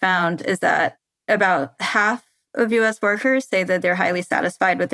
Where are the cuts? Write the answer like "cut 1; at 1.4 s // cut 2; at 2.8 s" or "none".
cut 1; at 1.1 s